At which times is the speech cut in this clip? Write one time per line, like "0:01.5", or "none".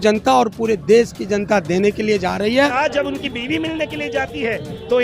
0:02.7